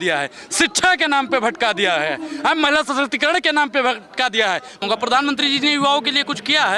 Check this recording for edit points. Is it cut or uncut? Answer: cut